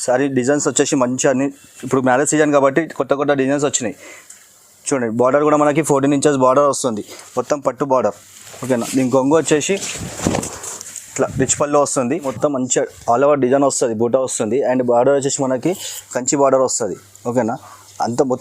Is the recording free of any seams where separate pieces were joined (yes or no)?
no